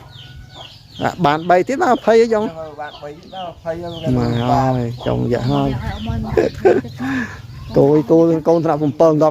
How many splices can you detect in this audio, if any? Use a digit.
0